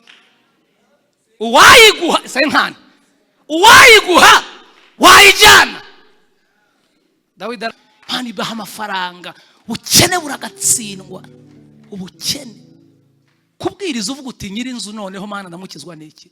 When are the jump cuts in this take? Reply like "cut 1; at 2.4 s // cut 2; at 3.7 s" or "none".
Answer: cut 1; at 7.7 s